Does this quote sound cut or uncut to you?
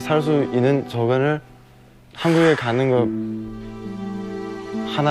uncut